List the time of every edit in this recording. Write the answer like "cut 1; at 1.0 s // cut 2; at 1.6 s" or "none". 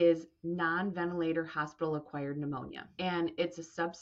cut 1; at 2.8 s